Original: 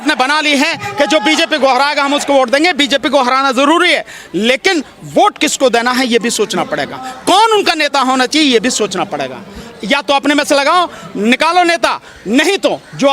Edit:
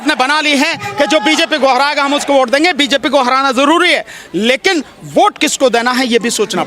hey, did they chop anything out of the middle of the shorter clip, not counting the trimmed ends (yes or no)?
no